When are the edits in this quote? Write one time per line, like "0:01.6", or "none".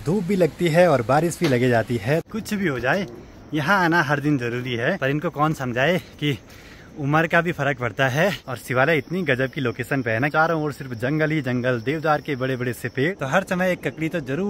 0:02.3
0:05.0
0:08.6
0:10.3
0:13.2